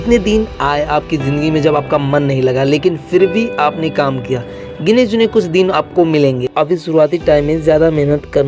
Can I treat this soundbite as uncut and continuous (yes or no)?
no